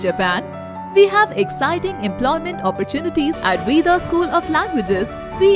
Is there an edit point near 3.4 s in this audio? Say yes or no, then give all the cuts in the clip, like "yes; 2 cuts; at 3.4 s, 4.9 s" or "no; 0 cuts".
yes; 1 cut; at 3.4 s